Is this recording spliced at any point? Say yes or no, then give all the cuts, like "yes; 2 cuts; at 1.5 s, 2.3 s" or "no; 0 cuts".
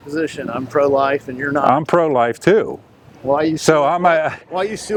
no; 0 cuts